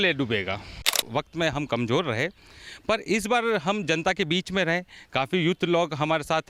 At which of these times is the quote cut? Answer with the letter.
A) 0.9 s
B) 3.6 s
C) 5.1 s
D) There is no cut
A